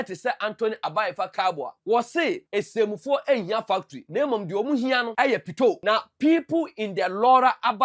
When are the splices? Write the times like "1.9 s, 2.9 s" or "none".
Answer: 1.7 s, 2.4 s, 4.0 s, 5.1 s, 5.8 s